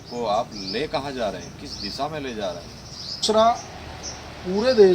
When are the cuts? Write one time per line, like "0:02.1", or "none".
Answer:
0:03.2